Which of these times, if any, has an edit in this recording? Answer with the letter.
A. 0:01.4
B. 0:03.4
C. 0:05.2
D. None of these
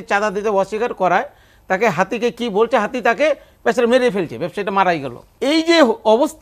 C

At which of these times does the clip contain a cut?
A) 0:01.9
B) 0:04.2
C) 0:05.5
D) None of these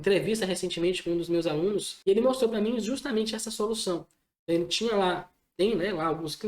A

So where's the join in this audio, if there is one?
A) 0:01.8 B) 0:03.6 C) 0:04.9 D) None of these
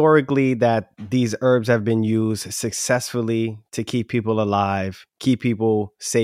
D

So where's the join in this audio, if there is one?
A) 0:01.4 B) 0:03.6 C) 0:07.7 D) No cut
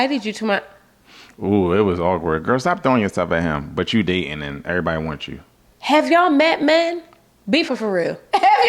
C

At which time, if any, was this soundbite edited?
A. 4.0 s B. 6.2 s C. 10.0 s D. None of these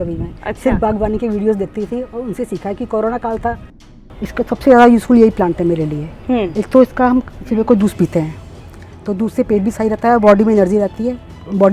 A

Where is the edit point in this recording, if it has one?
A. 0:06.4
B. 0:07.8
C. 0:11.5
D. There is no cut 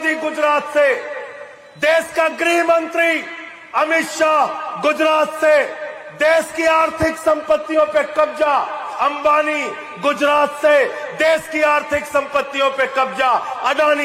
C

